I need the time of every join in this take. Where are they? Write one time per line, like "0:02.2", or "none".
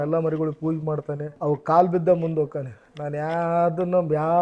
none